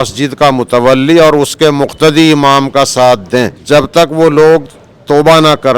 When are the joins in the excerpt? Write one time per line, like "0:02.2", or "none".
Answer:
0:03.6